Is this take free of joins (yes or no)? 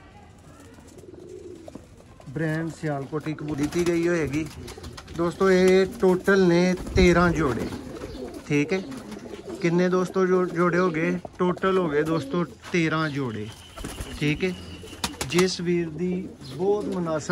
no